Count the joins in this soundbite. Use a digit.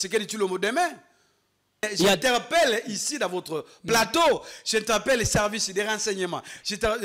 1